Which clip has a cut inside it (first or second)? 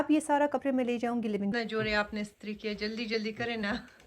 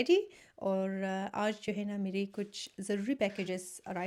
first